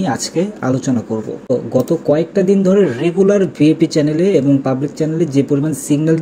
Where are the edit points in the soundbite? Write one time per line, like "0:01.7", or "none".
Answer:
0:01.4